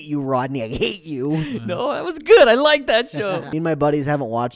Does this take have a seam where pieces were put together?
yes; 1 cut; at 3.5 s

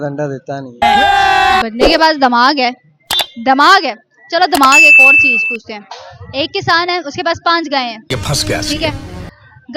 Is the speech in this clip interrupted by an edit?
no; 0 cuts

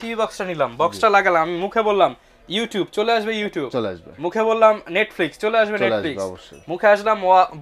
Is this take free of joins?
yes; 0 cuts

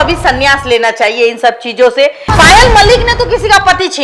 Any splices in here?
yes; 1 cut; at 2.3 s

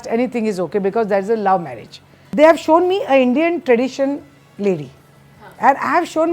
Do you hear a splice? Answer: yes; 1 cut; at 2.2 s

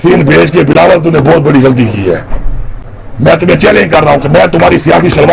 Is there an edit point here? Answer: no; 0 cuts

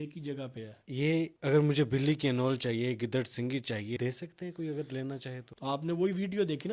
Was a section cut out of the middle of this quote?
yes; 3 cuts; at 0.9 s, 4.0 s, 5.5 s

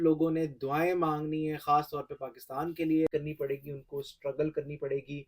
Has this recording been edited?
yes; 1 cut; at 3.1 s

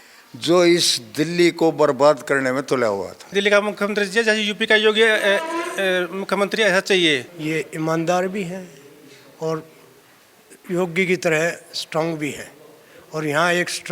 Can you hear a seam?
yes; 2 cuts; at 3.3 s, 7.3 s

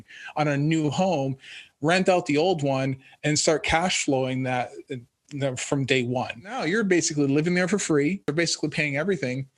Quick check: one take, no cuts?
no; 2 cuts; at 6.6 s, 8.3 s

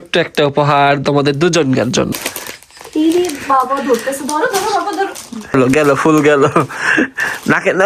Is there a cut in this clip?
yes; 2 cuts; at 2.1 s, 5.5 s

